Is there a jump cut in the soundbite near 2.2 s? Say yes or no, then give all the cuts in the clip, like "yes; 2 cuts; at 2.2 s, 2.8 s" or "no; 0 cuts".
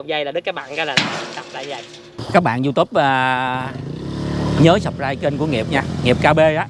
yes; 1 cut; at 2.2 s